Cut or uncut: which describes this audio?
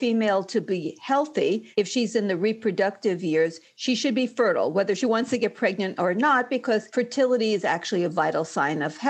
cut